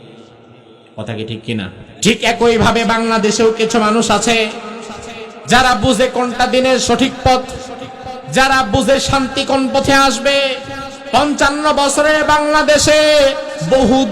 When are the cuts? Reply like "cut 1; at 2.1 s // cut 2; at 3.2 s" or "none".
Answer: cut 1; at 1.8 s